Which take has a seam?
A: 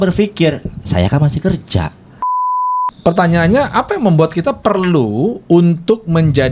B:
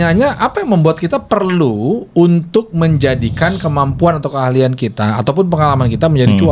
A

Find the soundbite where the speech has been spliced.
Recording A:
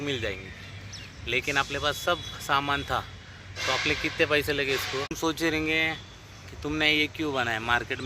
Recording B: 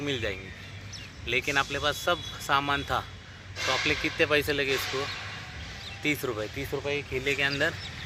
A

